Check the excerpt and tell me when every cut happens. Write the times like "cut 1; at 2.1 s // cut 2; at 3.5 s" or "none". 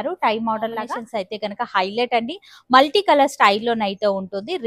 cut 1; at 1.0 s